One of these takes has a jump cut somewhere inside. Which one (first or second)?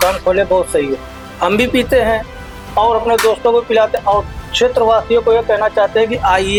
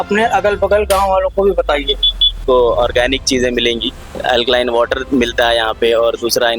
second